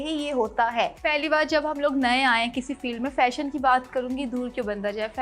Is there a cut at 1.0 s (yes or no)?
yes